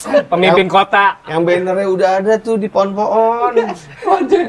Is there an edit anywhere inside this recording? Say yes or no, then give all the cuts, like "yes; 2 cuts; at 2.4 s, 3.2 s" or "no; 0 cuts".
no; 0 cuts